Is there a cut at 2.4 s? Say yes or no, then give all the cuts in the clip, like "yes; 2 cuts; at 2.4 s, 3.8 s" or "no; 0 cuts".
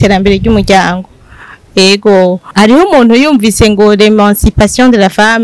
yes; 1 cut; at 2.4 s